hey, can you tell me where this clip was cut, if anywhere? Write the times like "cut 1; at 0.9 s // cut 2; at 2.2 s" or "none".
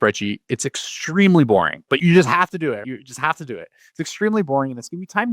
cut 1; at 1.8 s // cut 2; at 2.8 s